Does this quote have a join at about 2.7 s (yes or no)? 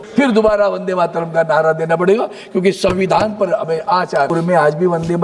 no